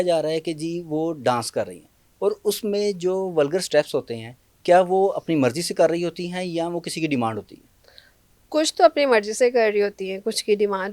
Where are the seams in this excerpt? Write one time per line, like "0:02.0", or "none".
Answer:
none